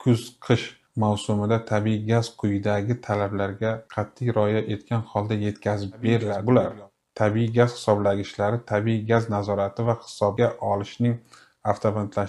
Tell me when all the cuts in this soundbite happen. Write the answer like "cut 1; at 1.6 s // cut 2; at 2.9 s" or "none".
cut 1; at 6.3 s

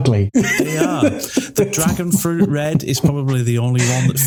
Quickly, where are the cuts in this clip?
none

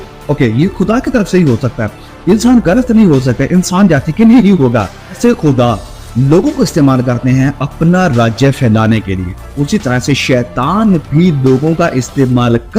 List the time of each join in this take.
cut 1; at 5.2 s // cut 2; at 9.5 s

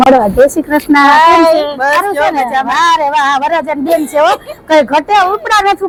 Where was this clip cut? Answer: none

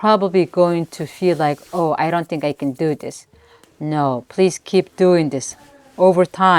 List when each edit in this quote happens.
none

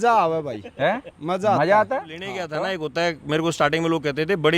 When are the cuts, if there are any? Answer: cut 1; at 2.5 s

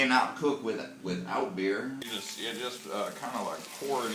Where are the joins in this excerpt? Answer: cut 1; at 2.1 s

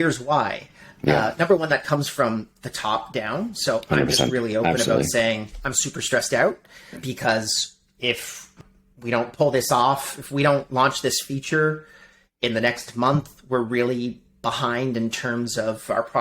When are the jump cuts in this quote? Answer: cut 1; at 6.9 s // cut 2; at 8.5 s

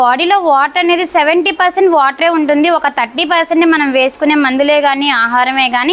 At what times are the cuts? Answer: none

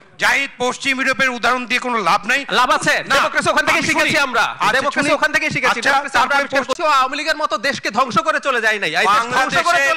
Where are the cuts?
cut 1; at 6.8 s

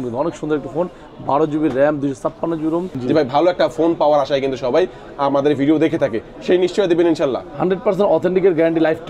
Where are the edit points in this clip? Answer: cut 1; at 2.9 s

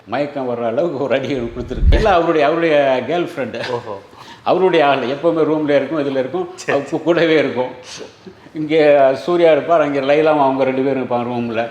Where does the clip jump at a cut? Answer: cut 1; at 1.8 s

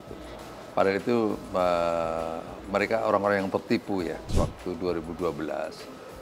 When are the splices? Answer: cut 1; at 4.3 s

